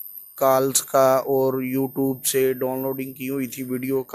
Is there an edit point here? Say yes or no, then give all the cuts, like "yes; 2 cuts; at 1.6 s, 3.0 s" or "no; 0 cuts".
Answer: no; 0 cuts